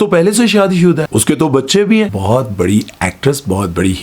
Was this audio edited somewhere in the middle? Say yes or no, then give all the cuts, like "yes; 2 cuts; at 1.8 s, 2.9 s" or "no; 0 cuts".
yes; 2 cuts; at 1.1 s, 2.2 s